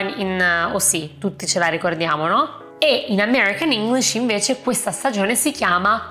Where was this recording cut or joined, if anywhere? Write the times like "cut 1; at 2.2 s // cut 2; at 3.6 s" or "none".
cut 1; at 2.6 s